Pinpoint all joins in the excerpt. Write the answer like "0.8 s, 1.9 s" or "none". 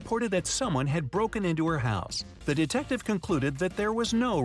2.2 s